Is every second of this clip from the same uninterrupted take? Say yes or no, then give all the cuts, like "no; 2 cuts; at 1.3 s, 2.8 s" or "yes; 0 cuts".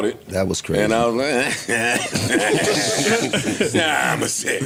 yes; 0 cuts